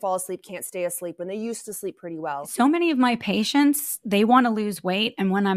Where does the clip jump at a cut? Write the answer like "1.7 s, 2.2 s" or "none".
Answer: 2.5 s

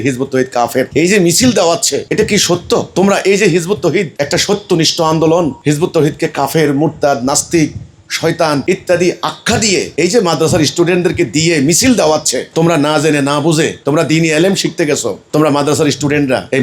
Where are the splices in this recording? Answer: none

